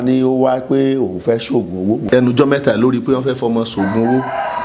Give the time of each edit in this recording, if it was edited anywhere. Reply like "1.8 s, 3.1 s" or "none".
2.0 s

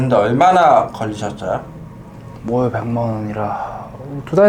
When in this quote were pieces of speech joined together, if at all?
none

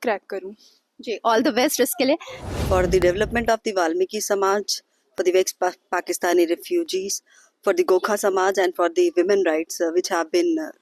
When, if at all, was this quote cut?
2.3 s

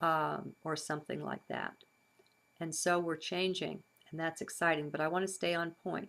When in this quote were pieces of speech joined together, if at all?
2.3 s

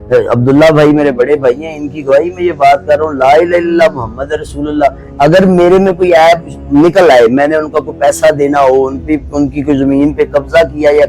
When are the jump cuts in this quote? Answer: none

